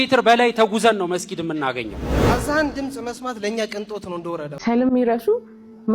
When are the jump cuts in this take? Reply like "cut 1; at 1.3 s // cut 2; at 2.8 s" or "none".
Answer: cut 1; at 4.5 s